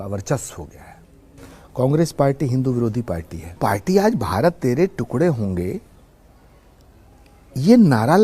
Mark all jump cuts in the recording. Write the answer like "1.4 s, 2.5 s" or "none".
3.6 s